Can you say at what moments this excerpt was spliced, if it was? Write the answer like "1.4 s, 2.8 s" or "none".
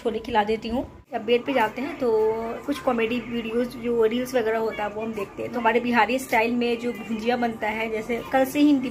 1.1 s, 2.6 s, 5.6 s, 8.0 s